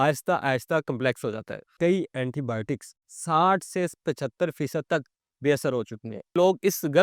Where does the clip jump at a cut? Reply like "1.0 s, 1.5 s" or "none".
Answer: 1.7 s, 6.3 s